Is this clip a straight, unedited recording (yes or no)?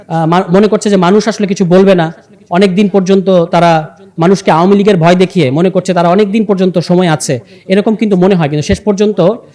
yes